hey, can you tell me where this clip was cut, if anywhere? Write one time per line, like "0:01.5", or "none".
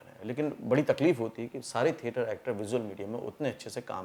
none